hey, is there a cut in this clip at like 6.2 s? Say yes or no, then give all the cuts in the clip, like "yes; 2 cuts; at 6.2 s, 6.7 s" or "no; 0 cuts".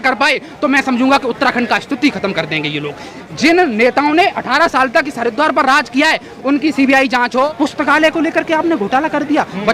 no; 2 cuts; at 3.1 s, 7.5 s